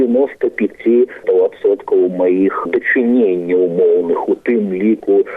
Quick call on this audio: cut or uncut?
cut